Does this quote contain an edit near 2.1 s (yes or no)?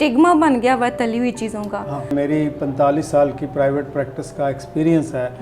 yes